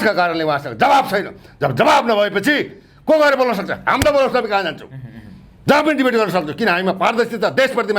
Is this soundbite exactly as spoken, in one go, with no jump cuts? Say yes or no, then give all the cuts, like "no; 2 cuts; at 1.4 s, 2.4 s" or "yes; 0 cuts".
yes; 0 cuts